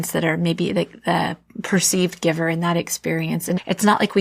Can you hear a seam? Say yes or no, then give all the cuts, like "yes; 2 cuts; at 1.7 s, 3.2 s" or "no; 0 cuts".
no; 0 cuts